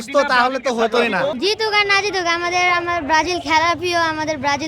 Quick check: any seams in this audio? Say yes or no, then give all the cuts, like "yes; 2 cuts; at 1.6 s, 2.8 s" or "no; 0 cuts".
yes; 1 cut; at 1.4 s